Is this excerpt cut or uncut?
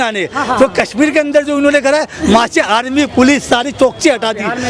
uncut